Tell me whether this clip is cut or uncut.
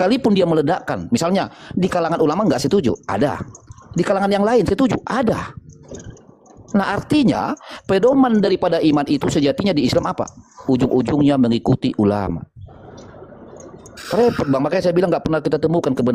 uncut